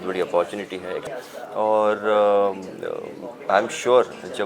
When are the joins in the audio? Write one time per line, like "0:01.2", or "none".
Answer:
0:01.1